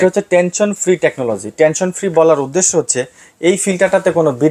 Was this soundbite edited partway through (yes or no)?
no